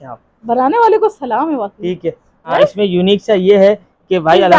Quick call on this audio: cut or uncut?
cut